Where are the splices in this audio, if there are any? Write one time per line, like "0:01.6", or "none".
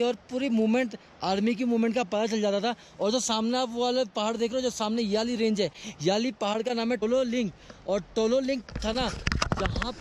none